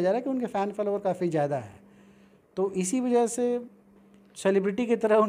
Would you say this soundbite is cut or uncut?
uncut